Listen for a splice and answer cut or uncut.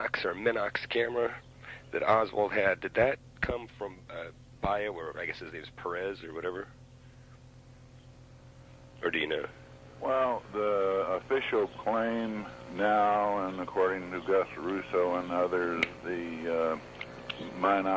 uncut